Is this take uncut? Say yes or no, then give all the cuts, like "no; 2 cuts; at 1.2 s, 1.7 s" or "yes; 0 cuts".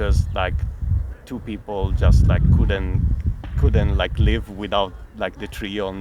yes; 0 cuts